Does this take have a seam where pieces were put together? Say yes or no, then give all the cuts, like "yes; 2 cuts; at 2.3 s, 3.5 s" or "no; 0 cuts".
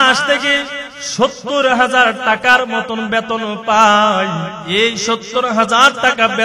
yes; 1 cut; at 4.6 s